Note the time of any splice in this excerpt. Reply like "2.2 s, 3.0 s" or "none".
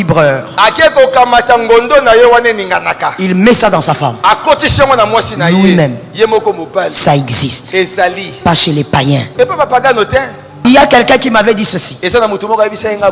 10.5 s